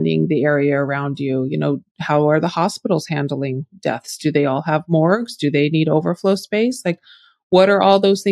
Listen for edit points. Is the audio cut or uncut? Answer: uncut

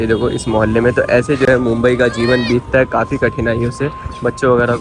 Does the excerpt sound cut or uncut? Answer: uncut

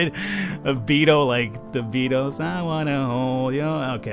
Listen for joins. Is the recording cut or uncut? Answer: uncut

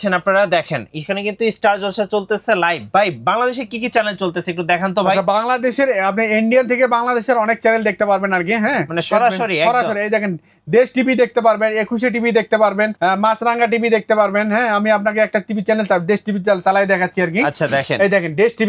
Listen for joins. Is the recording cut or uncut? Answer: cut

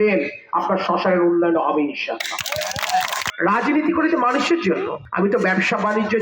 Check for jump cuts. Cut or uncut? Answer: cut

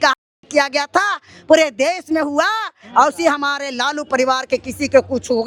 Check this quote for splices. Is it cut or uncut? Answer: uncut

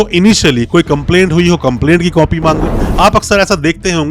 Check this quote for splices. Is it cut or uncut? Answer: cut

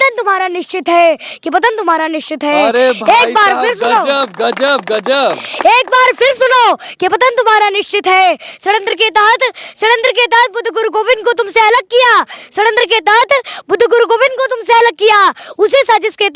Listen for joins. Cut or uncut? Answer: uncut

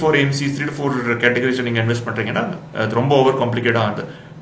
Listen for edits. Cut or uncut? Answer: uncut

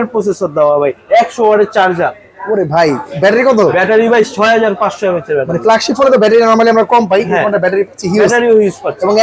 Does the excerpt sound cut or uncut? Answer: uncut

